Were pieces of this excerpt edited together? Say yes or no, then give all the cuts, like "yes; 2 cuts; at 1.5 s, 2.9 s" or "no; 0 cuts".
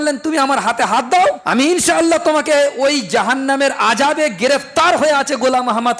yes; 1 cut; at 1.4 s